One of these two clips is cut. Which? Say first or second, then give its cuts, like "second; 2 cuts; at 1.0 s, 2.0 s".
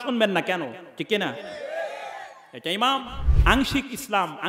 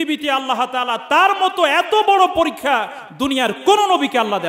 first; 1 cut; at 3.2 s